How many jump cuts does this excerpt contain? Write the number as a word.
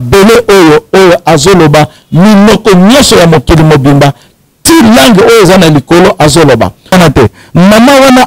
one